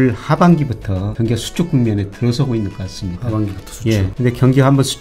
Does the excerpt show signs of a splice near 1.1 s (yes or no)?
yes